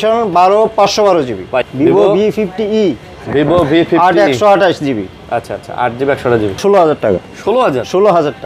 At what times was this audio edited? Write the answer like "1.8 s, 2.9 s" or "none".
1.6 s, 6.6 s